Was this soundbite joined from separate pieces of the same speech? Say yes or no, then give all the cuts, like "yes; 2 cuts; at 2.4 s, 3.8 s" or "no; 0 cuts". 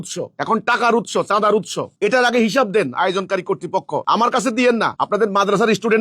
yes; 2 cuts; at 4.0 s, 5.0 s